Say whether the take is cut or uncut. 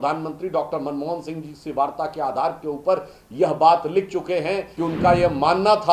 cut